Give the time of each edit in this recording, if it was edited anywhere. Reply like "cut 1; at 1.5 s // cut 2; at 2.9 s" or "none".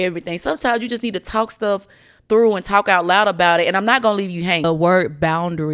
cut 1; at 4.6 s

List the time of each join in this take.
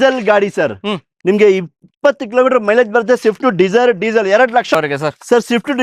cut 1; at 4.7 s

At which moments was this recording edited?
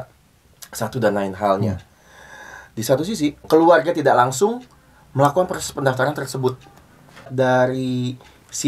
cut 1; at 3.4 s // cut 2; at 7.3 s

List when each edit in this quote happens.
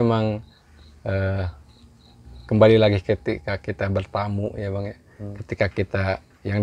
none

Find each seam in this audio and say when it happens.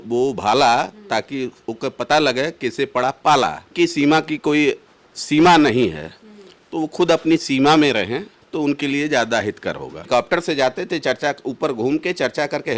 cut 1; at 3.7 s // cut 2; at 10.1 s

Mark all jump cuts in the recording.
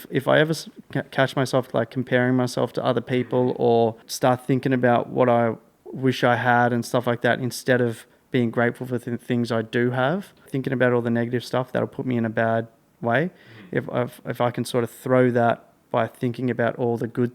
cut 1; at 4.1 s // cut 2; at 10.5 s

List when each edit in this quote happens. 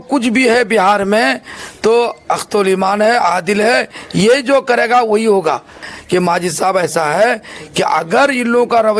cut 1; at 5.9 s

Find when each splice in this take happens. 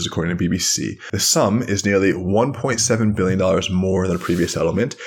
cut 1; at 1.1 s

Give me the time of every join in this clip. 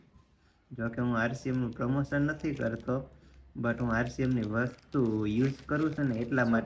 none

